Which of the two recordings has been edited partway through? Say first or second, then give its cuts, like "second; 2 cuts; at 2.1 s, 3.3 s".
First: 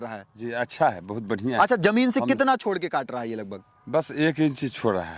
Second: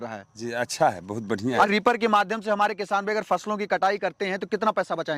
second; 1 cut; at 1.7 s